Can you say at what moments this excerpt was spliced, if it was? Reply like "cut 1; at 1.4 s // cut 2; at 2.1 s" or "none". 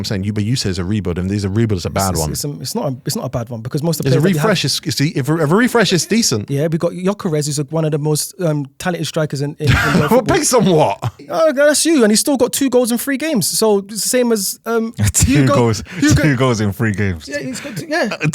cut 1; at 6.4 s // cut 2; at 11.3 s